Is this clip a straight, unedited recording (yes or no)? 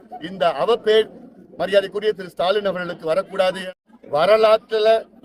no